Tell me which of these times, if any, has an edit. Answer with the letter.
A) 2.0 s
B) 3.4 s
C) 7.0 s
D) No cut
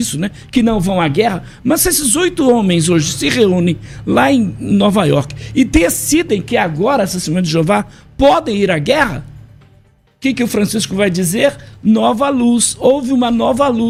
D